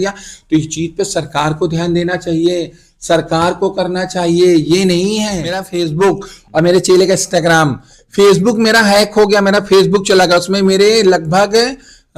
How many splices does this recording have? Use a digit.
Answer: 1